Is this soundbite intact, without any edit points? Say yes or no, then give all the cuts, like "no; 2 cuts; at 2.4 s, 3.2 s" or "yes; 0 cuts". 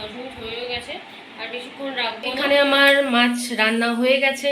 no; 1 cut; at 2.5 s